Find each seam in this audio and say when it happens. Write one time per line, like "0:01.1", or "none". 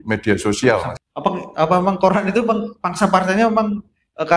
0:01.0